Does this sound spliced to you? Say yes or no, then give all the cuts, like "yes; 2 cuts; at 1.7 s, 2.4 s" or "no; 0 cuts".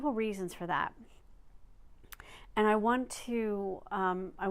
yes; 1 cut; at 3.6 s